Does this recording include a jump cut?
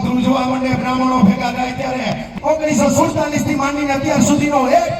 yes; 1 cut; at 2.3 s

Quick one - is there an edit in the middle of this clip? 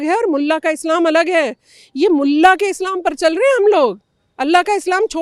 no; 0 cuts

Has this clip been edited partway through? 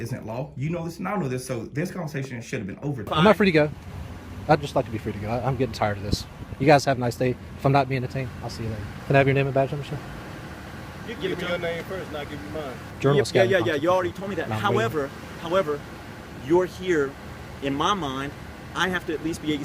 yes; 3 cuts; at 3.1 s, 8.9 s, 12.9 s

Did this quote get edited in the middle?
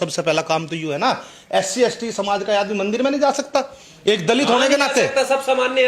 no; 0 cuts

